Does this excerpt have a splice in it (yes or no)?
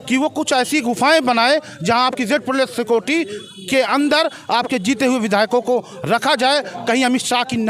no